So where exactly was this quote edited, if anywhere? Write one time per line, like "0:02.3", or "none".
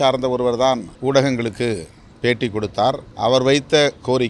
0:00.9
0:03.1